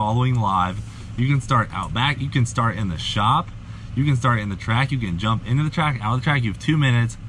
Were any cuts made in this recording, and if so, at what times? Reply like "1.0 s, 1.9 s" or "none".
none

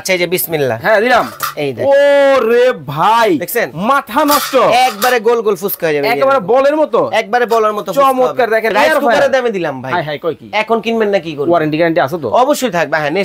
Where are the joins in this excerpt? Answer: 8.7 s

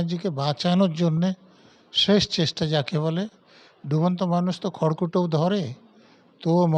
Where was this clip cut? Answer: none

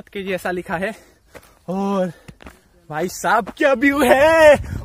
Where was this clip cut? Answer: none

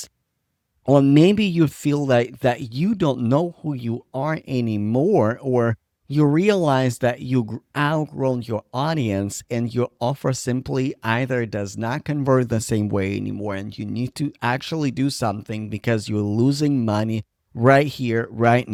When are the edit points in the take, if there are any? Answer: none

